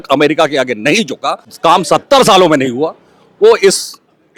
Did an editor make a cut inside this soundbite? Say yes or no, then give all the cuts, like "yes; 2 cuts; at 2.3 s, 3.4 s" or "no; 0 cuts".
yes; 1 cut; at 1.5 s